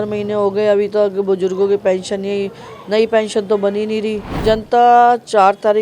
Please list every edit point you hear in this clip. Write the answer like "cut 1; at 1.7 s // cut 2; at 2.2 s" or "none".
cut 1; at 4.4 s